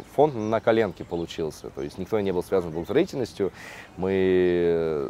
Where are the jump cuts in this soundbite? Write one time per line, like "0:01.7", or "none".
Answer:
none